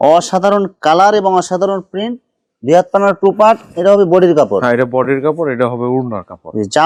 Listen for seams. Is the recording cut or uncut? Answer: uncut